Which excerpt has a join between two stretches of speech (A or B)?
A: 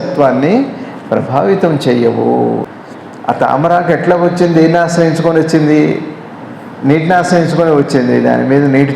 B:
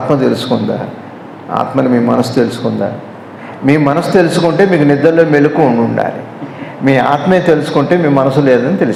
A